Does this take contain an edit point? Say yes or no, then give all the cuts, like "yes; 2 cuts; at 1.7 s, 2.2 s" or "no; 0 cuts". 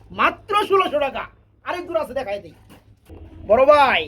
no; 0 cuts